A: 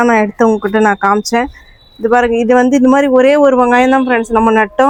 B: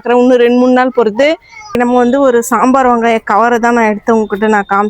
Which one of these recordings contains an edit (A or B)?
B